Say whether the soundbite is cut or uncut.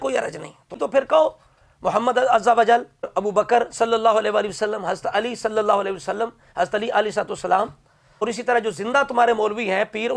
cut